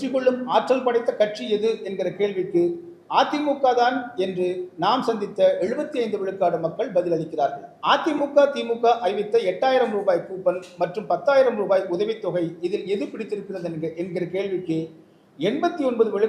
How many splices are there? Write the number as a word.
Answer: one